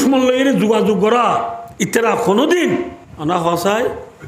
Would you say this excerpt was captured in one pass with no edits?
no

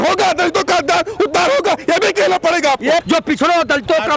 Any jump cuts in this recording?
yes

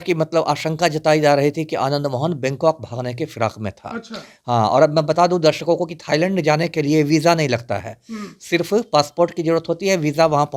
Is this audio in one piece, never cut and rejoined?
yes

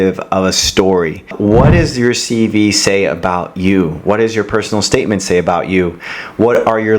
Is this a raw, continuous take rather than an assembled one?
no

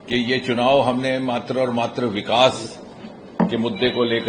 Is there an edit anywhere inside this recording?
no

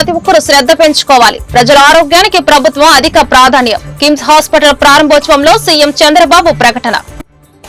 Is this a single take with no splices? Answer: yes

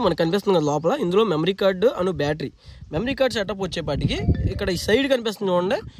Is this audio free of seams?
yes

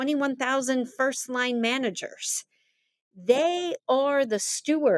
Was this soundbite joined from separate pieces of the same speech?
no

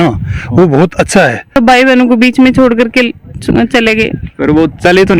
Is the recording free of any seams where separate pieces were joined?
no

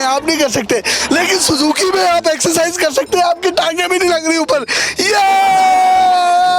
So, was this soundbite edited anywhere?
no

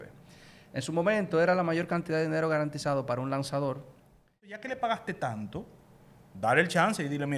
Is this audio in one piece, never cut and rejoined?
no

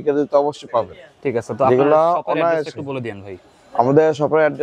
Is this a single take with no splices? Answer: yes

